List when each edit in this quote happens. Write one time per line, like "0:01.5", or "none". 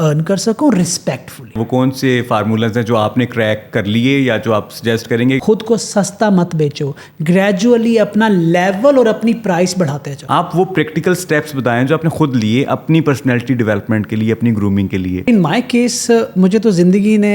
0:01.6
0:05.4
0:10.1
0:15.3